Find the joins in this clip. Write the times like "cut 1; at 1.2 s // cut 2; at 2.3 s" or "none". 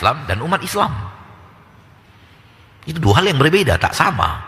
none